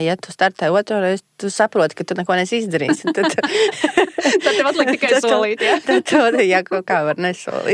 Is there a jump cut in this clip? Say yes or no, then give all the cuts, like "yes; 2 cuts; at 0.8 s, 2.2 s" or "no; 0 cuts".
no; 0 cuts